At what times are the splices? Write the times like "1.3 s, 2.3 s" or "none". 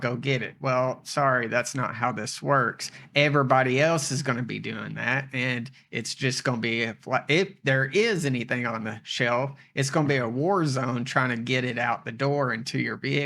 none